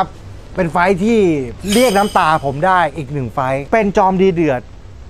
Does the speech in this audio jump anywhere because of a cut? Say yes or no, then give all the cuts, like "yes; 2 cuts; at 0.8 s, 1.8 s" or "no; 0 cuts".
yes; 2 cuts; at 1.5 s, 3.6 s